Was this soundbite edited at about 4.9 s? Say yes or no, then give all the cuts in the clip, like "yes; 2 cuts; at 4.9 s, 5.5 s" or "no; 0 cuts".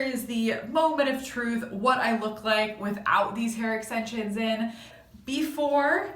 yes; 1 cut; at 4.9 s